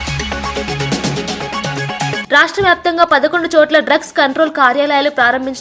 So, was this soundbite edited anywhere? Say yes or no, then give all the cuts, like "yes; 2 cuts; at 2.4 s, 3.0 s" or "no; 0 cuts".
yes; 1 cut; at 2.2 s